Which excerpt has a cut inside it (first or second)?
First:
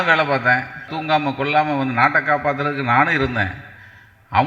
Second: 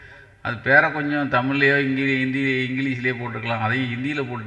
first